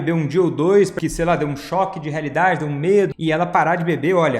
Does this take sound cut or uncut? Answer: cut